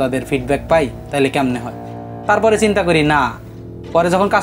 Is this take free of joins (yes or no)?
yes